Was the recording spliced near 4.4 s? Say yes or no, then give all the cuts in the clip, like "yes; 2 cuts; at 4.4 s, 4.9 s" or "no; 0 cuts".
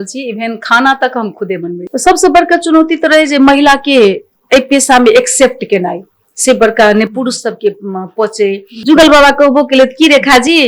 no; 2 cuts; at 1.8 s, 8.8 s